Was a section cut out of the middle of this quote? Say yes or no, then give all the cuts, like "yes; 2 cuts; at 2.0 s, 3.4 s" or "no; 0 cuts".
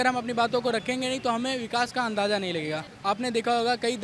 yes; 1 cut; at 2.9 s